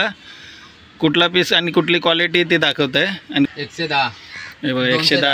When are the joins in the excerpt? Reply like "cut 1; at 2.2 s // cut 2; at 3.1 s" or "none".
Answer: cut 1; at 3.5 s